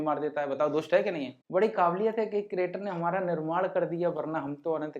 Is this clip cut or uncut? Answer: cut